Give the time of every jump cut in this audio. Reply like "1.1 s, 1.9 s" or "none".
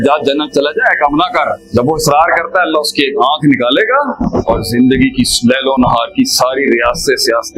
1.6 s, 4.2 s